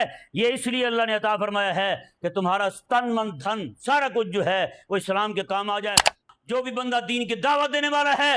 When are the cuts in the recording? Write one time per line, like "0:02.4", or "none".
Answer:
0:06.2

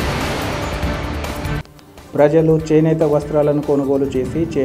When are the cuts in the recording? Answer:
0:01.6

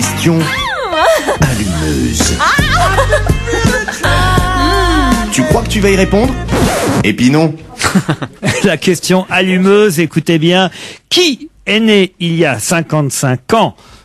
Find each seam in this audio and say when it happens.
none

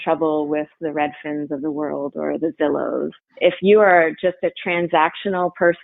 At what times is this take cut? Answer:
0:03.2

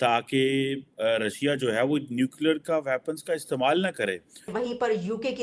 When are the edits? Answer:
0:04.5

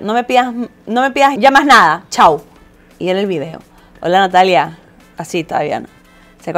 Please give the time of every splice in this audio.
0:01.3

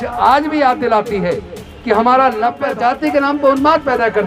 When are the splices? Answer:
0:02.6

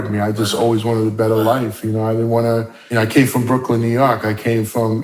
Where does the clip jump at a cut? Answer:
0:02.8

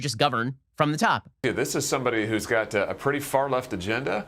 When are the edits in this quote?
0:01.4

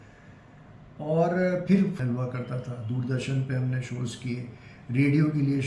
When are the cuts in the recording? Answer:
0:02.0

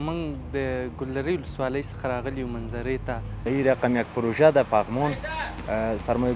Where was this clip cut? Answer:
0:03.4

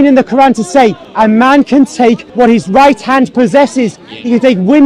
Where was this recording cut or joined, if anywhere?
0:01.0
0:02.3

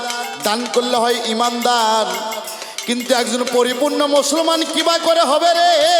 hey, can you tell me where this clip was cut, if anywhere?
none

